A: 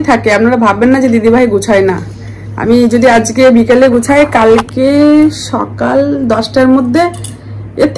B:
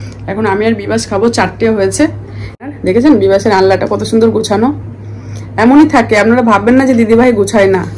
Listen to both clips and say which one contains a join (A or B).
B